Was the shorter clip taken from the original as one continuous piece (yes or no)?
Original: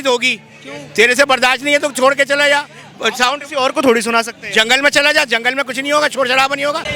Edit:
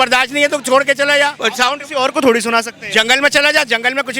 no